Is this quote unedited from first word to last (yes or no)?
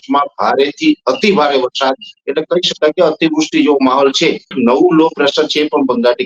no